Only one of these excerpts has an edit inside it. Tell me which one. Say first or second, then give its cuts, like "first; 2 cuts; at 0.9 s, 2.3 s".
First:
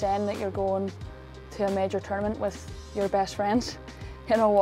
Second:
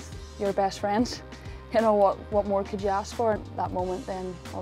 second; 1 cut; at 3.4 s